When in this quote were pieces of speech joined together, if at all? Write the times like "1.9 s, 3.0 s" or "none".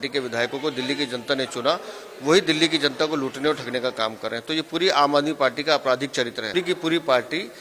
6.5 s

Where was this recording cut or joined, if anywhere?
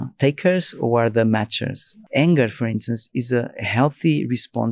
1.9 s

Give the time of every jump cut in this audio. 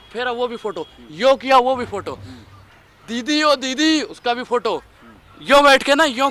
none

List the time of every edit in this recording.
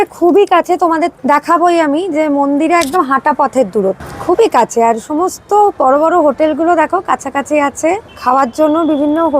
1.1 s, 4.1 s, 8.1 s

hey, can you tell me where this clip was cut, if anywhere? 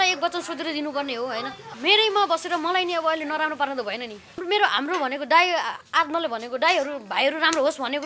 1.6 s, 4.4 s

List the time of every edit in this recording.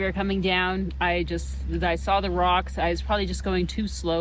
none

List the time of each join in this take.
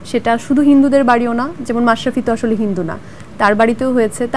none

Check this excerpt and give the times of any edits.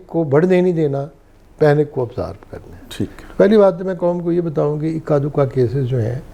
none

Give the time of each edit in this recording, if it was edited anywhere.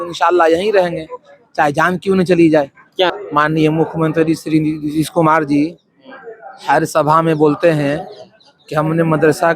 3.1 s

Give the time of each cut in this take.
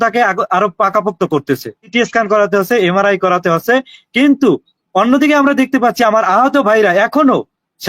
1.9 s

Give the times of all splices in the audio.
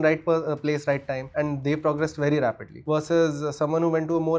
1.2 s, 2.7 s

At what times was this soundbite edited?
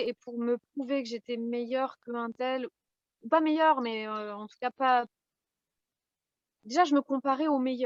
none

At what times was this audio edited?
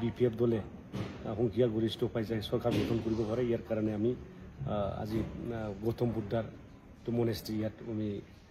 none

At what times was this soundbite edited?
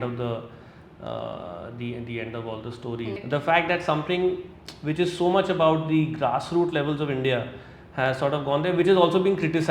3.2 s

